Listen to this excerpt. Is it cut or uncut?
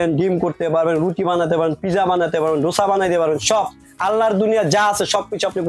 uncut